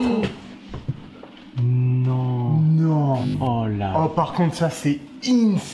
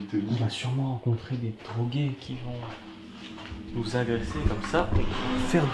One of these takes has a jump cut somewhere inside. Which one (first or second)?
first